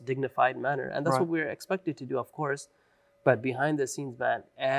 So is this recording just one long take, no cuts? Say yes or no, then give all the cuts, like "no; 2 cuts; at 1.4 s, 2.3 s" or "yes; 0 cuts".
yes; 0 cuts